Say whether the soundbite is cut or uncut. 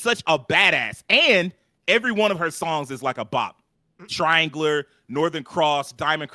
uncut